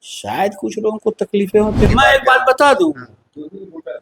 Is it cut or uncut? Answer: cut